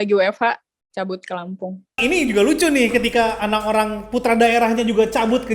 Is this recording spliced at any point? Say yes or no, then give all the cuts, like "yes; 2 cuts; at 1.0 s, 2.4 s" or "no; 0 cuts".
yes; 1 cut; at 2.0 s